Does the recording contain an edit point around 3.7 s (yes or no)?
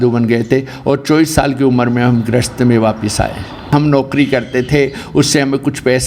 yes